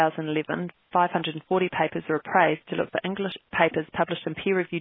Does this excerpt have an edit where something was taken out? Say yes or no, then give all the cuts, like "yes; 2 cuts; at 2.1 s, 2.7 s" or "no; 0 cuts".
yes; 1 cut; at 3.4 s